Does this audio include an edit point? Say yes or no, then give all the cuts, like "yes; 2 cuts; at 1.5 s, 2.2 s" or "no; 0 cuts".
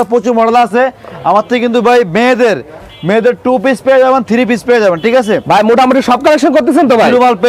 no; 0 cuts